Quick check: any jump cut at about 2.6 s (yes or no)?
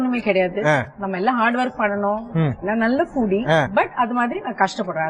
yes